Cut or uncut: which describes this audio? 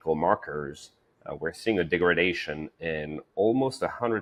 uncut